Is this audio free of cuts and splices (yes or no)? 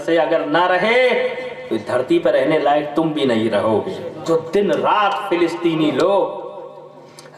no